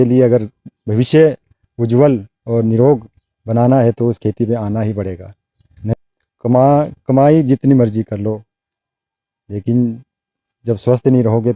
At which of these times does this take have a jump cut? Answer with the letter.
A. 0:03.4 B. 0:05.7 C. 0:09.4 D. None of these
B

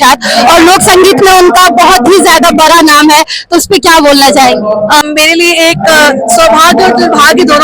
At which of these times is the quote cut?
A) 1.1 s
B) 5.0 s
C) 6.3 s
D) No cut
B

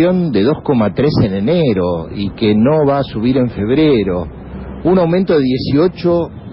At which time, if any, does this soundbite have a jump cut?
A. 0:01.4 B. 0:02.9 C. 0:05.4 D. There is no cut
A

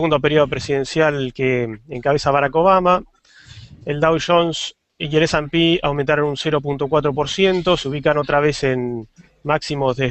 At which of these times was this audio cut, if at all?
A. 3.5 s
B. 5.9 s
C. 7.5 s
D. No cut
C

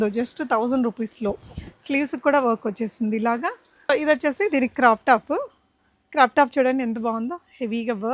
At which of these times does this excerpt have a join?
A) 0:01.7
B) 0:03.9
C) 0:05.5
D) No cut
B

